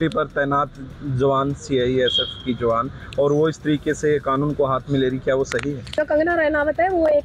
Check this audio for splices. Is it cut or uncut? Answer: cut